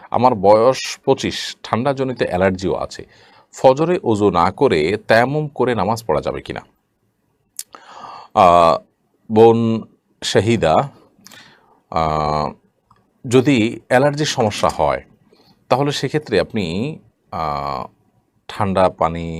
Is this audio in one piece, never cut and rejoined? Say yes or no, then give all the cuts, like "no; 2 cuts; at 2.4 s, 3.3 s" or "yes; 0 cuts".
yes; 0 cuts